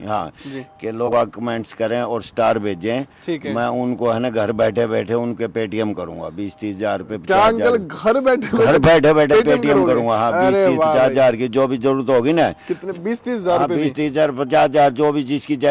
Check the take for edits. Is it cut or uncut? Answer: cut